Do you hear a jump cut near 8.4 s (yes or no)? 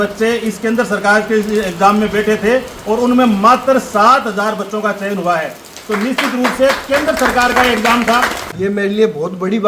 yes